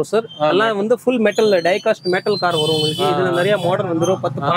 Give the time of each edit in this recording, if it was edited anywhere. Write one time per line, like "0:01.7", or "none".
none

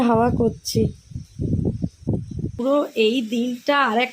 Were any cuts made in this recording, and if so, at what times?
0:02.6

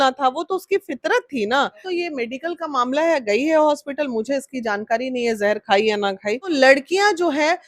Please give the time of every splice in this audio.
0:01.8
0:06.5

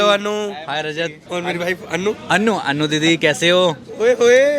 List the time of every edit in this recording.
0:01.2

